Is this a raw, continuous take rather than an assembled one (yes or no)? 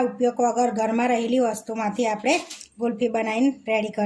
yes